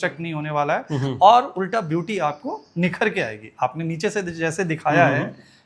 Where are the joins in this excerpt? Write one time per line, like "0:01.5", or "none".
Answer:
none